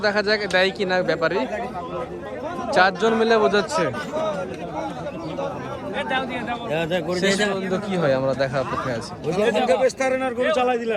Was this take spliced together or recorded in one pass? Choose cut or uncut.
uncut